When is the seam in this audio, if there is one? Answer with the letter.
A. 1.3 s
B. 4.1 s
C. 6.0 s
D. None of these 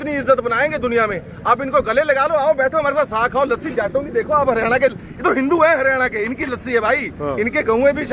D